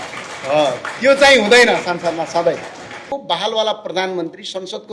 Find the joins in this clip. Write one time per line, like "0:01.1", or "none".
0:03.0

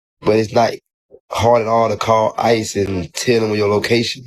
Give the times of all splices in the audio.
none

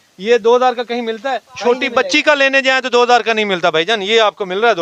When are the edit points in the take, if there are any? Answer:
none

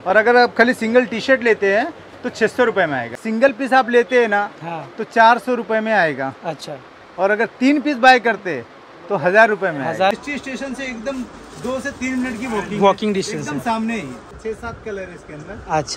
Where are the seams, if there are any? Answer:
0:03.2
0:10.1
0:14.4

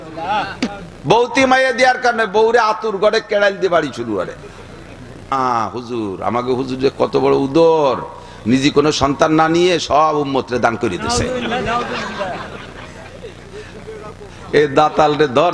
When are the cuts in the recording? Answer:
0:05.3

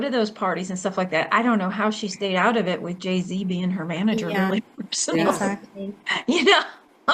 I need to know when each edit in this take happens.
none

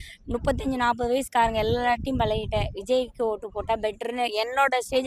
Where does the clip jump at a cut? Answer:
none

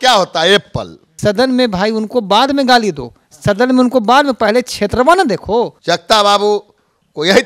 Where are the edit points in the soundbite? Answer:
0:01.0
0:05.8

